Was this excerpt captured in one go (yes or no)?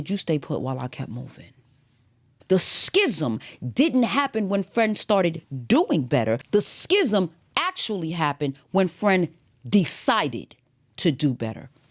no